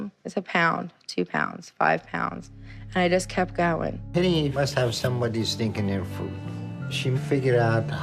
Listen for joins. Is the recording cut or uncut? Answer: cut